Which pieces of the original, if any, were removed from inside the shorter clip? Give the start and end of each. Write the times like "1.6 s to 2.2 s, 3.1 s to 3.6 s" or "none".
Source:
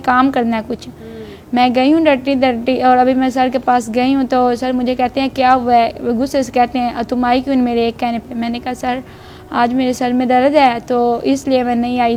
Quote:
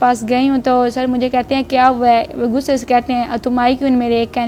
none